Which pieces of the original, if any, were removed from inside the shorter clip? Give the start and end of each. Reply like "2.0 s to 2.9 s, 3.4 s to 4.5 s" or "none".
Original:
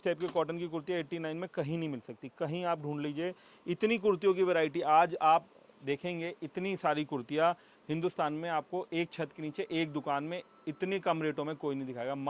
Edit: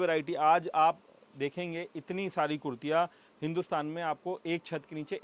none